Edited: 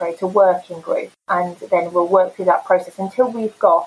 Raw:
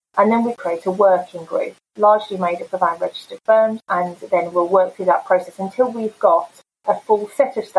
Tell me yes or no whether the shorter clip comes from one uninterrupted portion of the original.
no